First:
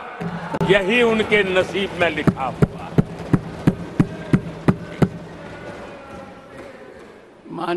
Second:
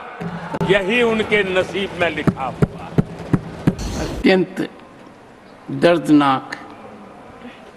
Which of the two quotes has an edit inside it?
second; 1 cut; at 3.8 s

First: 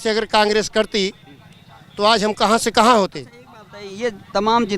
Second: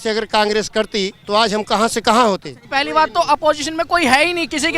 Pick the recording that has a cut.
second; 2 cuts; at 1.2 s, 2.5 s

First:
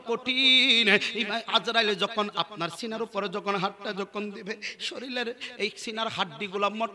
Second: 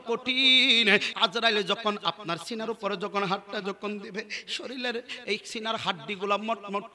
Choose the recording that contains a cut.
second; 1 cut; at 1.1 s

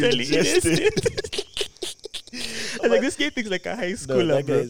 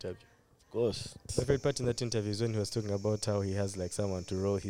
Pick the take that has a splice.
second; 1 cut; at 1.3 s

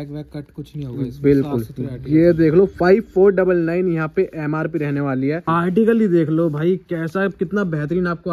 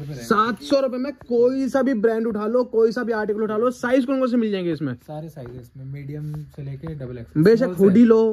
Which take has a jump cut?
first; 1 cut; at 5.4 s

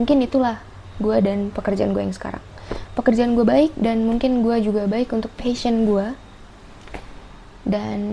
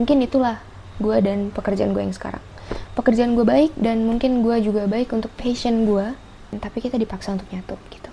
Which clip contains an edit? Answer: second; 1 cut; at 6.6 s

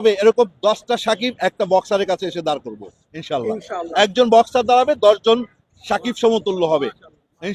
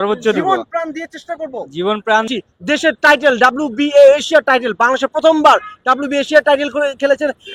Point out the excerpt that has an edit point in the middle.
second; 1 cut; at 2.3 s

